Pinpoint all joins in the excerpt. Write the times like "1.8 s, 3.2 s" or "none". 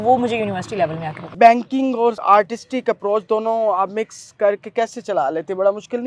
1.2 s